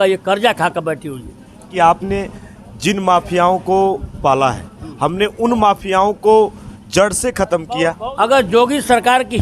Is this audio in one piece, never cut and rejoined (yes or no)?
no